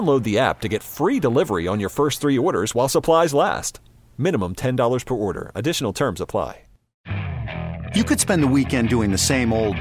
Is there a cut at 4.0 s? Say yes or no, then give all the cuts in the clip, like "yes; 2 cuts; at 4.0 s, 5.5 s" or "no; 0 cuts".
no; 1 cut; at 6.9 s